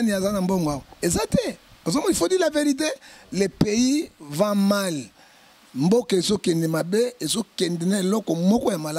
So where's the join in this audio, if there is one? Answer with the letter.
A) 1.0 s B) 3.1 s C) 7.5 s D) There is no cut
D